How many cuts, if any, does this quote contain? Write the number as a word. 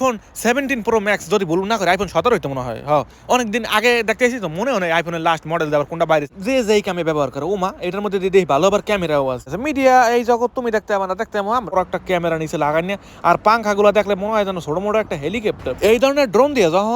three